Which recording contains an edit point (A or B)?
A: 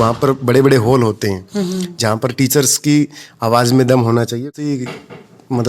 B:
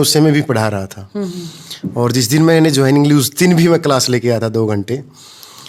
A